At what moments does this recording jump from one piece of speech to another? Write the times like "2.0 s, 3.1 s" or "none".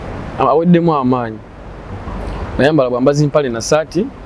none